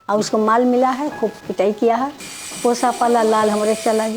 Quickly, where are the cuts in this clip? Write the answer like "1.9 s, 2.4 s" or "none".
1.4 s, 2.3 s